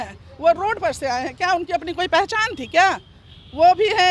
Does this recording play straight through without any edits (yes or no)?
yes